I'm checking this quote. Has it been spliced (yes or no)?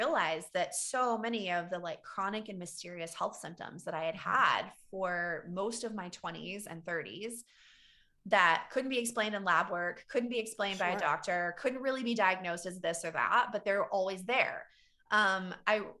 no